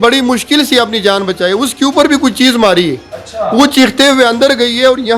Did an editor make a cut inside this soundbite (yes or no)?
no